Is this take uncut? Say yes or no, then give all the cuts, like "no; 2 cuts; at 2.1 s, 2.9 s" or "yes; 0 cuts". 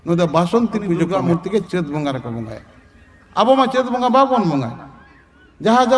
no; 1 cut; at 1.1 s